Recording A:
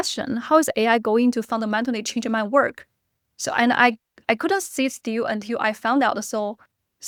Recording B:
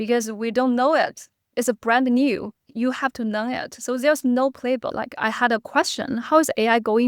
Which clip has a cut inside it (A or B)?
B